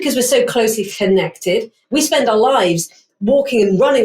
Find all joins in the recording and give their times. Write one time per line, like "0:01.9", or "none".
0:01.8

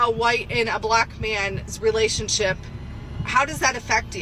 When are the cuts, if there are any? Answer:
none

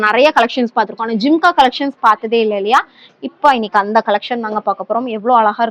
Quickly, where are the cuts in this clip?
none

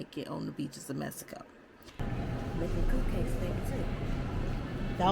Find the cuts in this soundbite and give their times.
0:02.1

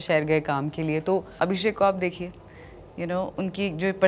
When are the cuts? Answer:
0:01.3

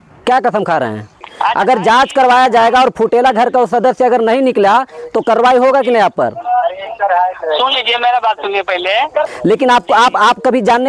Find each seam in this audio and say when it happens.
0:01.3
0:09.3

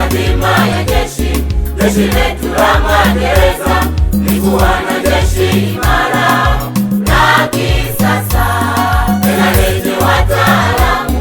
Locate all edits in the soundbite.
none

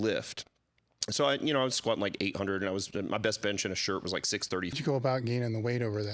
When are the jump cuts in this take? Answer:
0:04.7

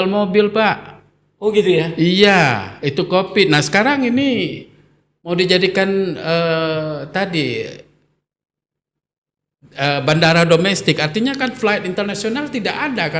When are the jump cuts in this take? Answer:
none

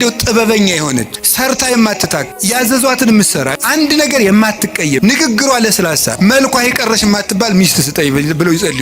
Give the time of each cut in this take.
0:01.2
0:02.3
0:03.6
0:05.0
0:06.2

